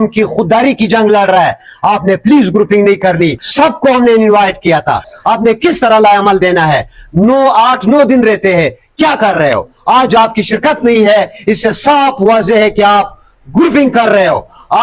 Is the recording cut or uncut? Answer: cut